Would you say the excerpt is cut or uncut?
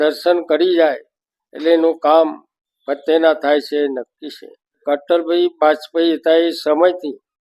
cut